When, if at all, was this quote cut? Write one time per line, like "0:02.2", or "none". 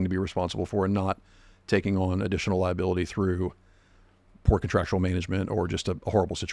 none